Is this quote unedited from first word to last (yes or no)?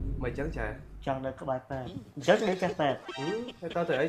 no